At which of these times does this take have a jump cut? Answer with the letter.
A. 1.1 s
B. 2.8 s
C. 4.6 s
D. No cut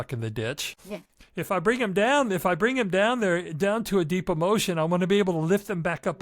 A